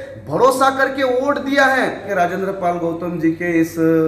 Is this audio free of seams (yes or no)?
no